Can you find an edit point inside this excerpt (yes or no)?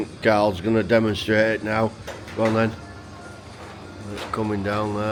no